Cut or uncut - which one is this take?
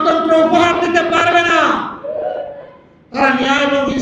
uncut